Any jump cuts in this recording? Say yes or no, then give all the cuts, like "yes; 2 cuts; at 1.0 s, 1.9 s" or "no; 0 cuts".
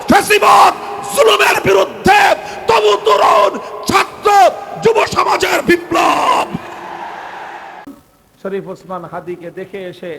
yes; 1 cut; at 8.0 s